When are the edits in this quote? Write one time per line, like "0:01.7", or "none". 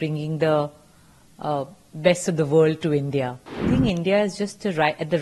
0:03.6